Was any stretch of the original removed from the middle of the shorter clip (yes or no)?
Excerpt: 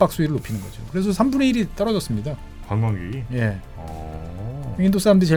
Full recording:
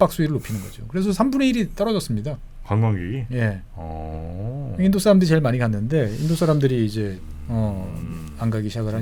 no